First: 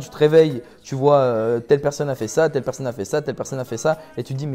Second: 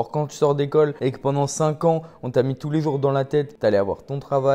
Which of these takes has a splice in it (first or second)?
second